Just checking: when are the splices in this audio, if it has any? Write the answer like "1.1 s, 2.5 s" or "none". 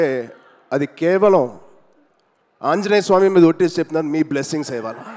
none